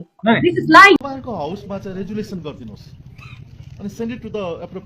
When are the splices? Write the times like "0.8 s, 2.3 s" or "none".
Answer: 1.1 s